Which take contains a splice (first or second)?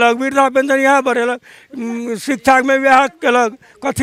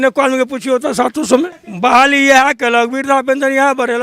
second